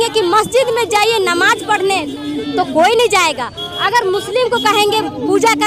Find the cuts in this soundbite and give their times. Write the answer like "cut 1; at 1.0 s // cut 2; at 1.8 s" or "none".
none